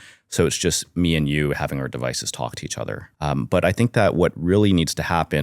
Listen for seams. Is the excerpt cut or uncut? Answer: cut